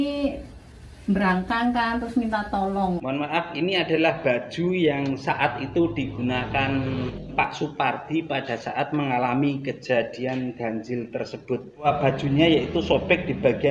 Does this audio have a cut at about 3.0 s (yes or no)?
yes